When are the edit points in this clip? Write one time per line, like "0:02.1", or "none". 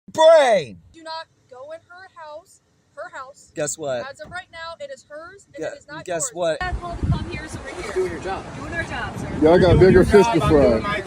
0:01.0
0:06.6
0:09.5